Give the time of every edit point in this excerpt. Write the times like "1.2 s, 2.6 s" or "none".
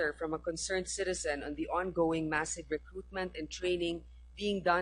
none